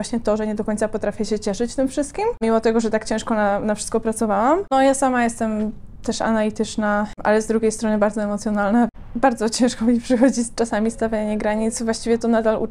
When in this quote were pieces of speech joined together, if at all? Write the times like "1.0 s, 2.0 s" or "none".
2.4 s, 4.7 s, 7.2 s, 8.9 s